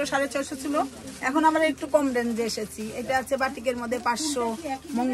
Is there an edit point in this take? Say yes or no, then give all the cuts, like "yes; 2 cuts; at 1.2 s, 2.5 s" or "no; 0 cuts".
no; 0 cuts